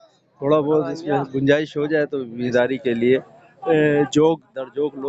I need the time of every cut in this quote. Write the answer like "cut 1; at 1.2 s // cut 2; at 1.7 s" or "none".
cut 1; at 2.4 s

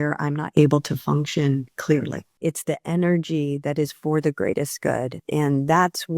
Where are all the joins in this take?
cut 1; at 2.2 s // cut 2; at 5.2 s

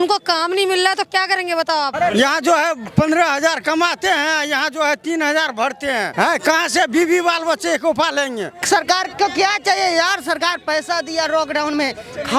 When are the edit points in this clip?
cut 1; at 1.9 s // cut 2; at 6.1 s // cut 3; at 8.5 s

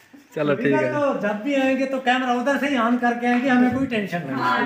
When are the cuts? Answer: none

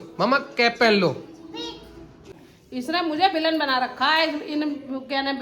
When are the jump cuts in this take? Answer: cut 1; at 2.1 s

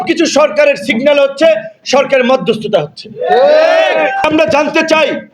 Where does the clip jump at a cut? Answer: cut 1; at 4.2 s

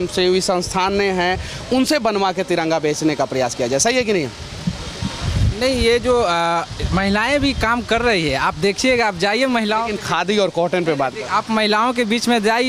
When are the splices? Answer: none

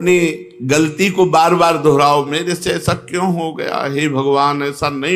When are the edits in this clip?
none

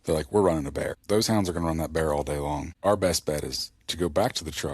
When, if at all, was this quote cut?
cut 1; at 1.0 s // cut 2; at 2.7 s

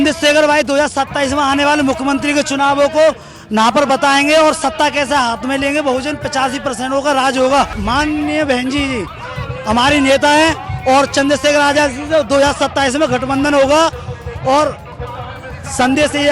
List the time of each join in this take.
cut 1; at 7.8 s

